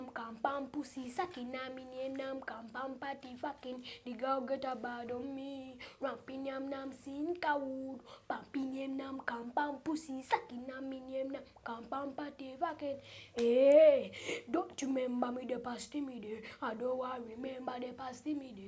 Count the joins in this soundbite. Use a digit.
0